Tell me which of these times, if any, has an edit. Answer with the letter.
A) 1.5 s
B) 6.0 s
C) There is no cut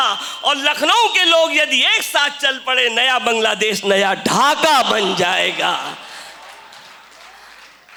C